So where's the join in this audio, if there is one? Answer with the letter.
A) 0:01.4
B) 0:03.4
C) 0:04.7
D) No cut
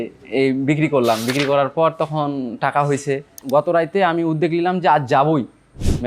B